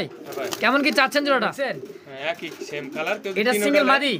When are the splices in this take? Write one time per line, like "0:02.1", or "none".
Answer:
0:01.8